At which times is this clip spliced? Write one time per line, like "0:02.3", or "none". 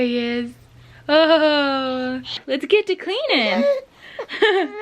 0:02.3